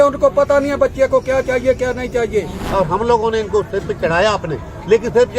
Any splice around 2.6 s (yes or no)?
yes